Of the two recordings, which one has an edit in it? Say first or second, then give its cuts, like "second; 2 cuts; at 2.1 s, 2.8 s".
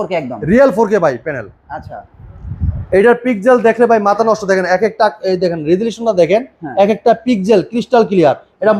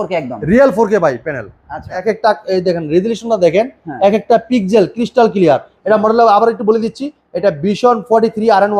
second; 1 cut; at 2.0 s